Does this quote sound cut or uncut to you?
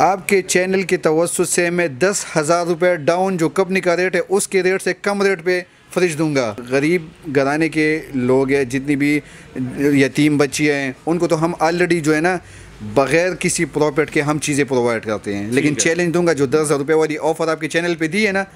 uncut